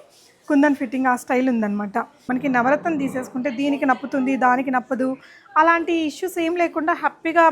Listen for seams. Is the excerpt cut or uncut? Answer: cut